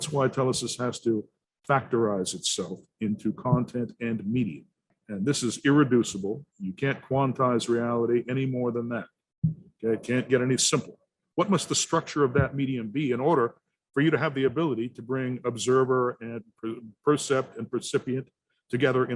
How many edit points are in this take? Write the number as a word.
two